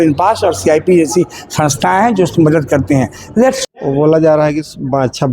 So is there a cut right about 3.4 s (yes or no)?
yes